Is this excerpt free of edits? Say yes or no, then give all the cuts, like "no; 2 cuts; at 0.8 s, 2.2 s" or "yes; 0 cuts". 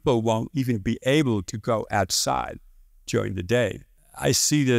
no; 1 cut; at 3.9 s